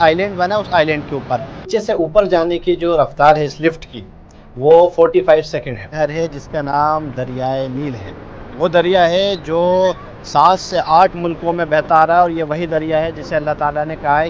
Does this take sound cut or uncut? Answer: cut